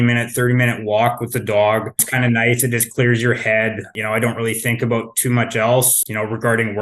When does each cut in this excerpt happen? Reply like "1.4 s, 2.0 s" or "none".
2.1 s, 3.9 s, 6.0 s